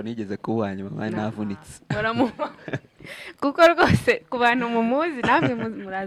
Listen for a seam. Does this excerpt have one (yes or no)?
no